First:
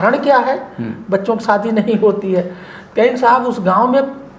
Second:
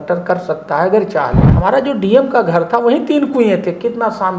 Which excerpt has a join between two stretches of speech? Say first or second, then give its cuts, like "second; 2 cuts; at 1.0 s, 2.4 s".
second; 1 cut; at 1.4 s